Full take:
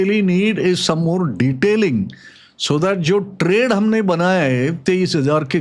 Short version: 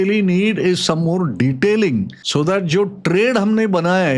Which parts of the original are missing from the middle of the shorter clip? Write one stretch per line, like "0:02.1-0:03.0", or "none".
0:02.2-0:02.5